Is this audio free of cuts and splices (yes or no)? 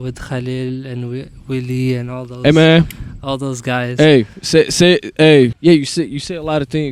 no